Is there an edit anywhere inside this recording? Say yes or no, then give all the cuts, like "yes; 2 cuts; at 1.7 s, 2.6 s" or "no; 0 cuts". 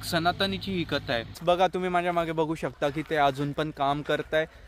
yes; 1 cut; at 1.3 s